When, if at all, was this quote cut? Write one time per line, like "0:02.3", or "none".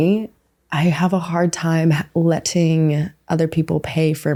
none